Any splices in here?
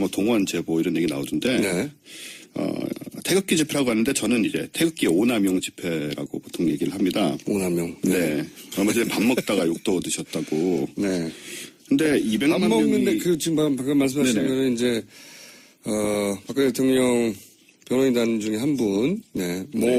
no; 0 cuts

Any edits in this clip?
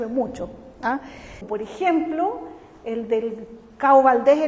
yes; 1 cut; at 1.4 s

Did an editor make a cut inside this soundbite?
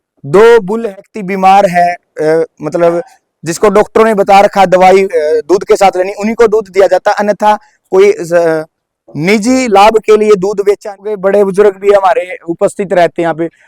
yes; 2 cuts; at 1.0 s, 11.2 s

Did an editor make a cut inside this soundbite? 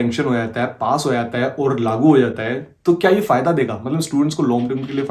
no; 0 cuts

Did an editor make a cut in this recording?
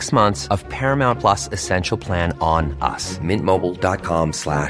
no; 0 cuts

